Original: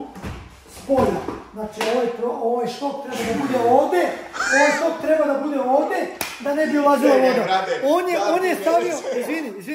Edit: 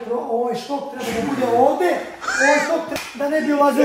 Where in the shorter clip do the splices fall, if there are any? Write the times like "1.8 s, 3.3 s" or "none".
2.9 s

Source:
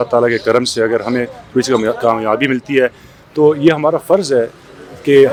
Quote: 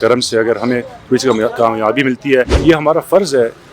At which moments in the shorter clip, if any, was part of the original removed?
2.6 s

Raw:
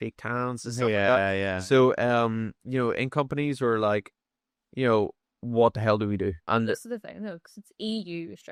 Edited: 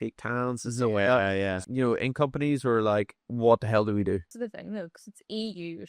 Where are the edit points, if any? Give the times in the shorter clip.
1.6 s, 3.2 s, 4.3 s

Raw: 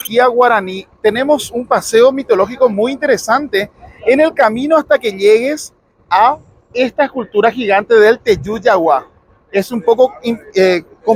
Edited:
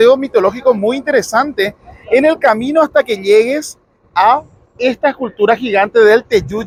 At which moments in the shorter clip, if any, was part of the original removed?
none

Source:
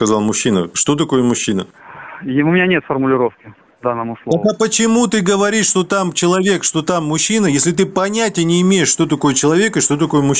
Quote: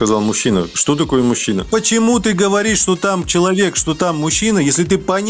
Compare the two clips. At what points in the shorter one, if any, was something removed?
1.7 s

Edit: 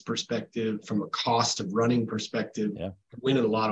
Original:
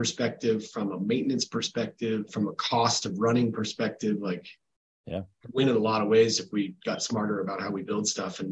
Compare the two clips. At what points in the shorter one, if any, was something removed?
2.8 s

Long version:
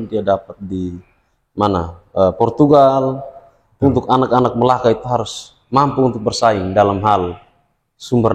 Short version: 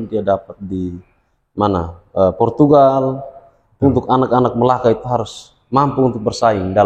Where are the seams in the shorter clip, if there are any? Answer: none

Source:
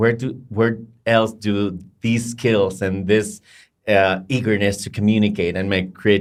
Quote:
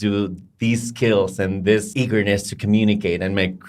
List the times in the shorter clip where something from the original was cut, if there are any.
1.9 s

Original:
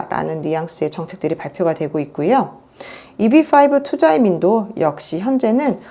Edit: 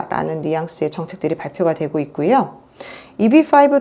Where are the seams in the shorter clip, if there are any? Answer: none

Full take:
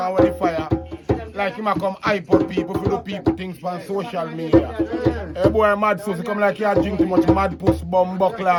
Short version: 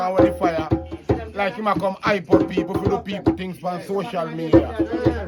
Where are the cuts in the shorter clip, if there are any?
none

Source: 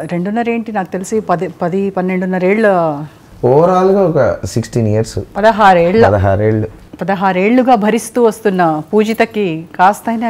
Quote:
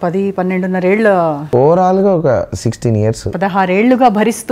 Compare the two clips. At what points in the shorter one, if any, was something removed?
1.4 s, 3.2 s

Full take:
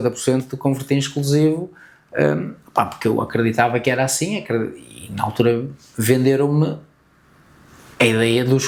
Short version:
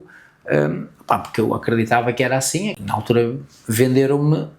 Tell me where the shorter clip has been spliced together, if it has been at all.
2.7 s

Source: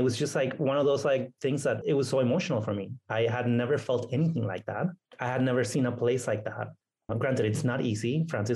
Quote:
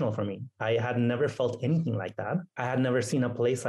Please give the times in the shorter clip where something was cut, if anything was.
2.5 s

